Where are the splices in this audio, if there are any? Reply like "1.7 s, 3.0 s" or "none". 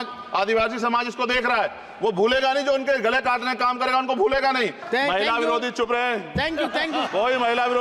4.8 s